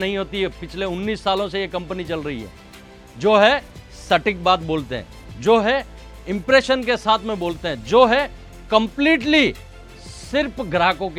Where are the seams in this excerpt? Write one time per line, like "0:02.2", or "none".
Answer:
none